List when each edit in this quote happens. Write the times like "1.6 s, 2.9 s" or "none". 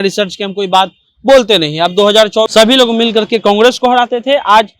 2.5 s